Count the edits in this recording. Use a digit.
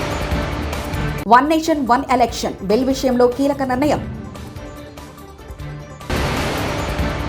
1